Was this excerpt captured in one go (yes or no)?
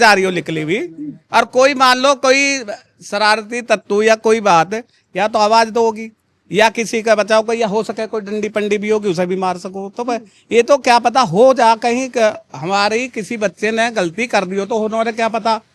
yes